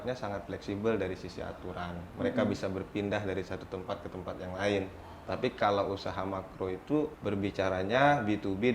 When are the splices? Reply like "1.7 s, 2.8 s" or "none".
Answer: 7.2 s

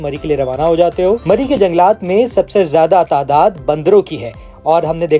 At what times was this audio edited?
1.2 s

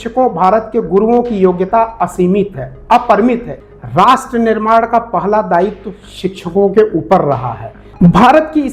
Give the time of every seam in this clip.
3.6 s, 7.8 s

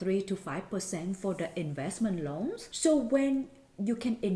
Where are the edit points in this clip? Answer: 2.7 s

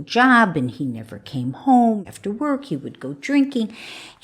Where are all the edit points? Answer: 2.1 s

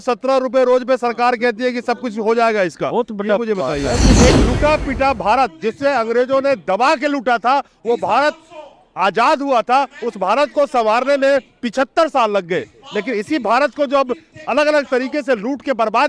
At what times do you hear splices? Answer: 4.2 s

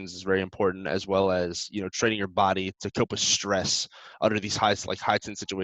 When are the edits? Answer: none

